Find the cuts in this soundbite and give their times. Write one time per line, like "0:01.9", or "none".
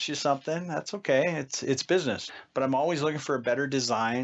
0:02.2